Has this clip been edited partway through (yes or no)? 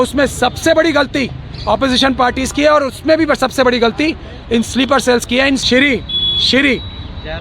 yes